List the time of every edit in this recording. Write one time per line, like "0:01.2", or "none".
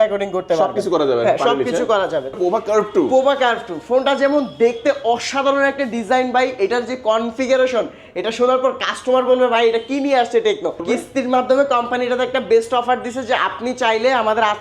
0:02.3
0:10.8